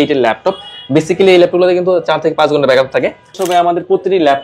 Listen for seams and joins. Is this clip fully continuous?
no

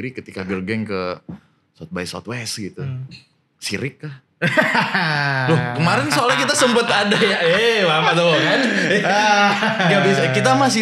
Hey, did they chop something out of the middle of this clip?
no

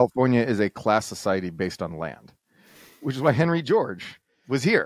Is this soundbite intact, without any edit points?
yes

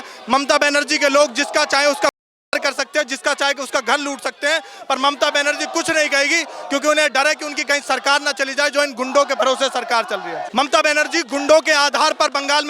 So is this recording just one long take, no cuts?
no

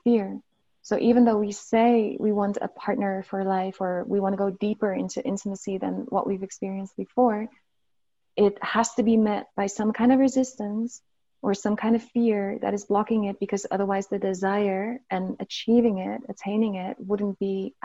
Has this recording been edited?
no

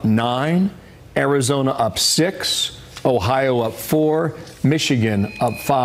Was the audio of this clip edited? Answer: no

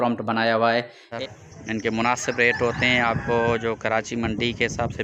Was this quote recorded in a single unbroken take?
no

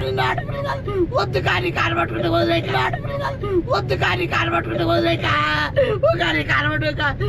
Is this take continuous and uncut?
yes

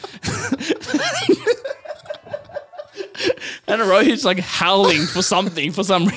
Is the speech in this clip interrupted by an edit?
no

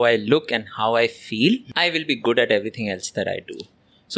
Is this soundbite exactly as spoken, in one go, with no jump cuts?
no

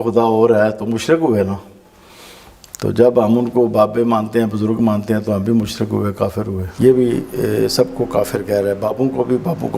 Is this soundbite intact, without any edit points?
no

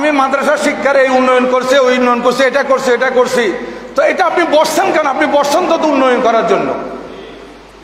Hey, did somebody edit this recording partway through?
no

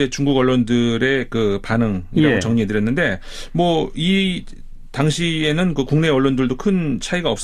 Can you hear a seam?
no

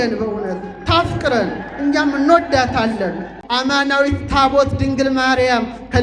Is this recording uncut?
no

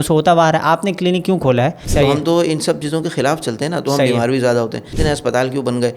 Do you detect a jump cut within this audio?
yes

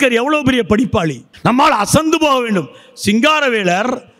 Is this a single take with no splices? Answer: no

